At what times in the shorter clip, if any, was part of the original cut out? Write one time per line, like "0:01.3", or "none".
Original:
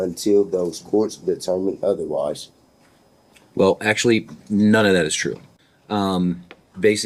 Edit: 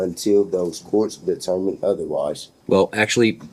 0:02.5